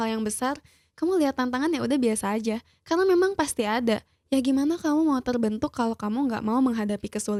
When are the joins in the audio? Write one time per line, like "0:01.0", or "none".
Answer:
none

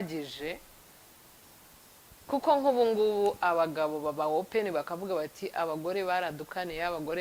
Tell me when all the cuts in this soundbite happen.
none

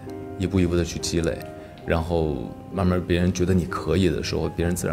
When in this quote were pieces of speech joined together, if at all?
none

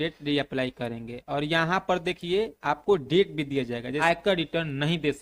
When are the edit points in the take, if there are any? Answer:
0:04.0

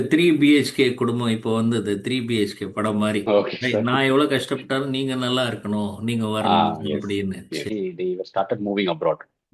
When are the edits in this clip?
0:03.2
0:07.7

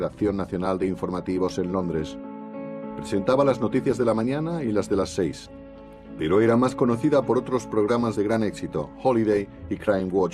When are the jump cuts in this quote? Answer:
0:07.2

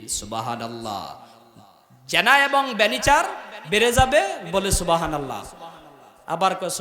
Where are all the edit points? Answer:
none

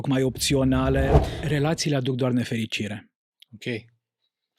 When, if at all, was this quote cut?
0:01.3

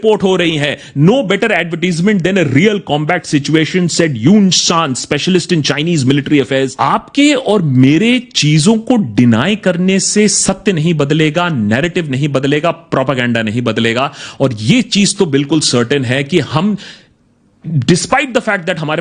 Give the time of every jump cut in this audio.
0:06.7

